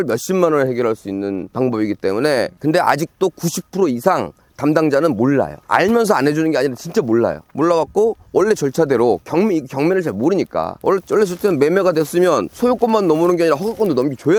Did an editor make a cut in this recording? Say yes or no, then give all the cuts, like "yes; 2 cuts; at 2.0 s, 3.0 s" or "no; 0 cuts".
no; 0 cuts